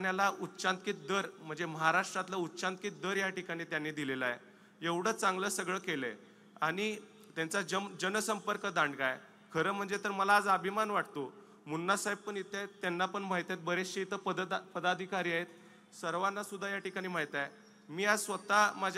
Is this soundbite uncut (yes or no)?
yes